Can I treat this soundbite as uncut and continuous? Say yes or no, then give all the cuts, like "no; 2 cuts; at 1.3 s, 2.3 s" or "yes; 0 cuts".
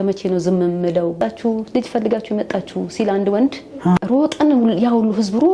no; 1 cut; at 1.1 s